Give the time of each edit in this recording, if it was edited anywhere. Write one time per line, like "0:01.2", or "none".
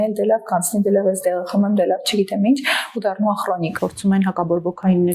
0:03.7